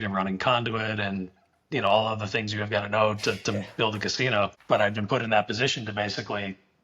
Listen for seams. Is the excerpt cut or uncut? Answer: cut